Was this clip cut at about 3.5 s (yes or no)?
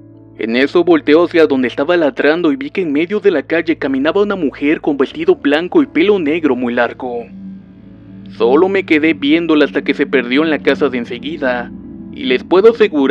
yes